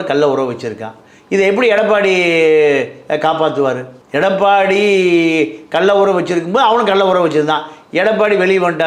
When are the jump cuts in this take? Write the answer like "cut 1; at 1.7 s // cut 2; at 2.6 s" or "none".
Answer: none